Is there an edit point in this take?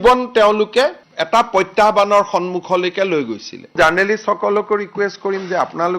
yes; 1 cut; at 3.7 s

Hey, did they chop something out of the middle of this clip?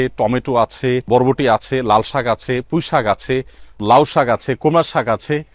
yes; 2 cuts; at 1.1 s, 3.8 s

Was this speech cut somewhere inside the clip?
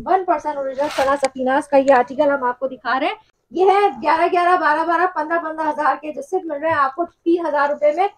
yes; 1 cut; at 3.3 s

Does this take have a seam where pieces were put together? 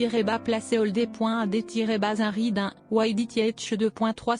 yes; 2 cuts; at 2.3 s, 3.5 s

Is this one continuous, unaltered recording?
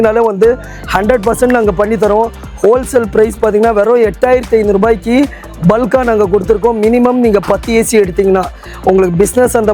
yes; 0 cuts

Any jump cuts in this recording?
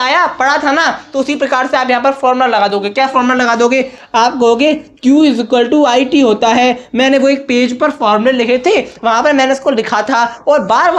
no; 0 cuts

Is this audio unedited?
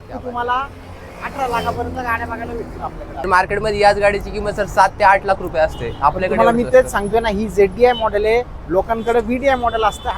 no; 1 cut; at 3.3 s

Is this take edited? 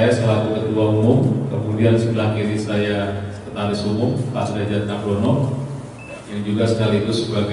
no; 0 cuts

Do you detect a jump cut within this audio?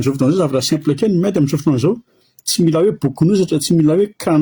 no; 0 cuts

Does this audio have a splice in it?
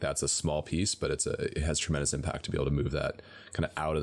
no; 0 cuts

